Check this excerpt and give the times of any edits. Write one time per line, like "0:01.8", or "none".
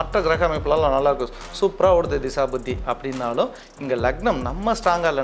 none